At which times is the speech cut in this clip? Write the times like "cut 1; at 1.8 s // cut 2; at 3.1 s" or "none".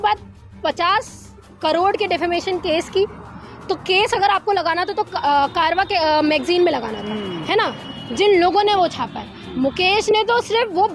none